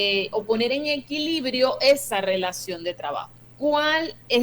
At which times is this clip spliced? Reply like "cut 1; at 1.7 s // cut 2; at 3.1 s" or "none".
cut 1; at 3.4 s